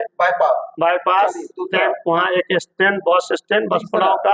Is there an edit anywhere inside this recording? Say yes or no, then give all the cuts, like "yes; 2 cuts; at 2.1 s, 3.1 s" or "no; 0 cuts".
no; 0 cuts